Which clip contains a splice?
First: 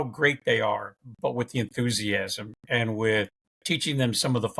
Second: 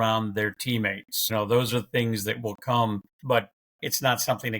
second; 2 cuts; at 1.3 s, 3.1 s

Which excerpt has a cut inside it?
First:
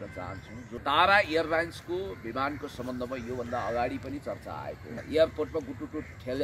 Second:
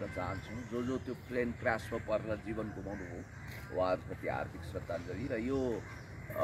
first; 2 cuts; at 0.8 s, 5.0 s

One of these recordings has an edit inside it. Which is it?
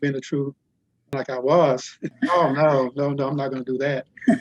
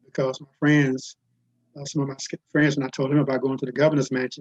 first; 2 cuts; at 1.1 s, 2.1 s

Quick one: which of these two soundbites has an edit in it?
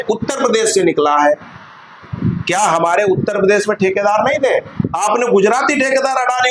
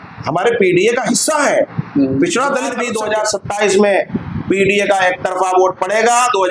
second; 1 cut; at 2.9 s

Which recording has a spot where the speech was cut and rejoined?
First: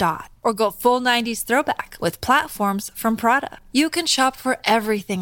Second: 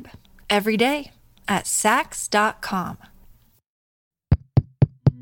second; 1 cut; at 4.2 s

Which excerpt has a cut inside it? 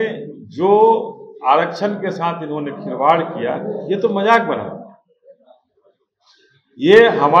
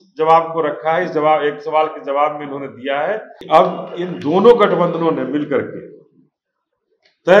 second; 1 cut; at 3.3 s

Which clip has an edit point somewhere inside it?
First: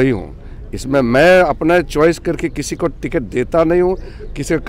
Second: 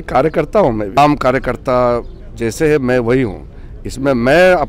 second; 1 cut; at 1.0 s

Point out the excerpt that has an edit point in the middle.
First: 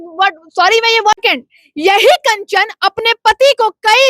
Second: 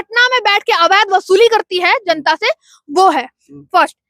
first; 1 cut; at 1.2 s

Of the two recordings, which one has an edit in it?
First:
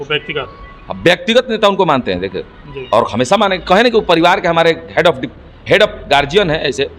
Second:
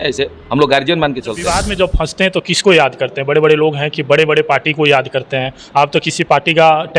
second; 1 cut; at 1.4 s

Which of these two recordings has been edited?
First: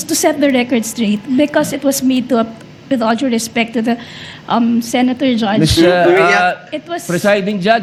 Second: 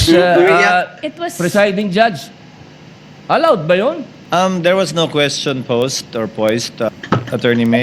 second; 2 cuts; at 4.1 s, 6.9 s

